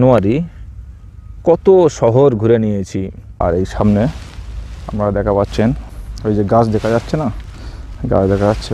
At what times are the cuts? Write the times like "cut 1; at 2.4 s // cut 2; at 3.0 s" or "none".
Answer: cut 1; at 3.2 s // cut 2; at 5.9 s